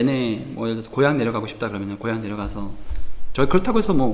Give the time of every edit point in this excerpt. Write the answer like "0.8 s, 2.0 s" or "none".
none